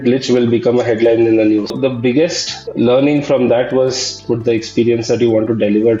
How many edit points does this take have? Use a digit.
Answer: 2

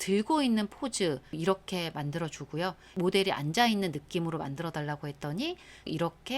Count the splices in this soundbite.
1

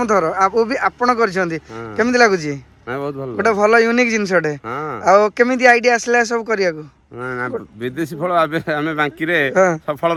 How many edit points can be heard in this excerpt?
0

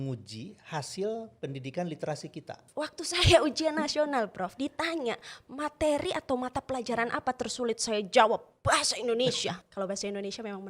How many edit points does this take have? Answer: 2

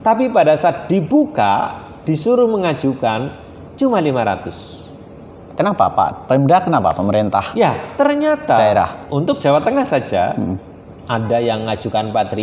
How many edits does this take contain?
0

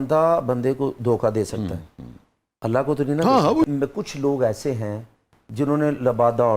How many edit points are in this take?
1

